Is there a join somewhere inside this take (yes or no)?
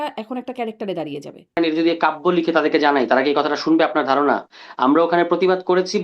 yes